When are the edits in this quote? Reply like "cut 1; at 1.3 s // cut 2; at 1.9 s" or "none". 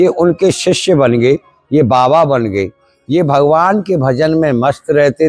none